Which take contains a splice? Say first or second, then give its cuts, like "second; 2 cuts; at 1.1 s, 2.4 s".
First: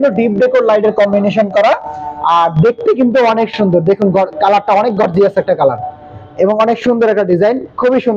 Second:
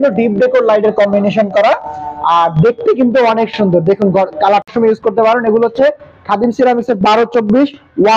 second; 1 cut; at 4.7 s